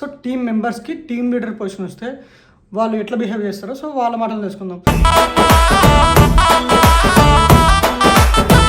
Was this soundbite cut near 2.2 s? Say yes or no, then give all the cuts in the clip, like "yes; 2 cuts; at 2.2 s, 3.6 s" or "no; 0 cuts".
no; 0 cuts